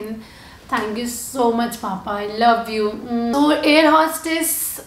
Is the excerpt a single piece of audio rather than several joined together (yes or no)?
no